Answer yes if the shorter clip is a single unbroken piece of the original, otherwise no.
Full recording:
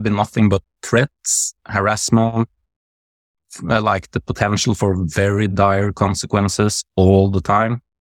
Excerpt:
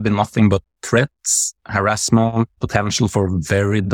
no